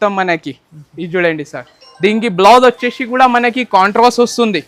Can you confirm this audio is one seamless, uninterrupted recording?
yes; 0 cuts

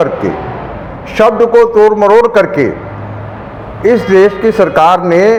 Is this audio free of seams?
yes; 0 cuts

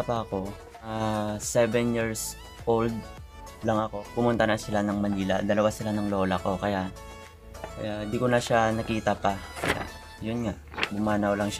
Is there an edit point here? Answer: yes; 1 cut; at 0.9 s

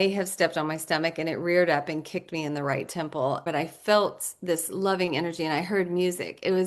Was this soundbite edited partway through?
yes; 1 cut; at 3.4 s

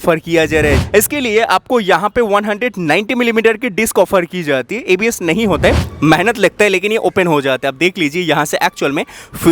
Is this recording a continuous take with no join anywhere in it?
no; 2 cuts; at 0.8 s, 5.9 s

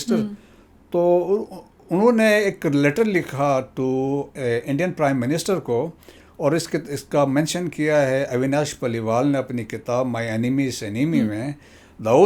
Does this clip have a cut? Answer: no; 0 cuts

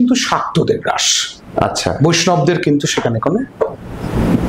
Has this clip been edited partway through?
no; 0 cuts

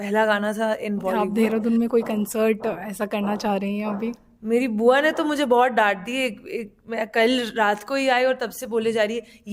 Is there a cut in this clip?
yes; 1 cut; at 1.2 s

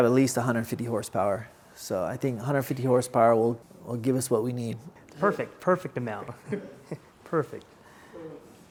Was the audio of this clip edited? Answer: no; 0 cuts

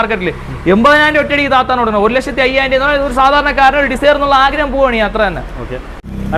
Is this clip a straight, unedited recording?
yes; 0 cuts

